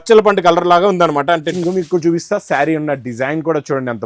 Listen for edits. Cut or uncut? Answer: cut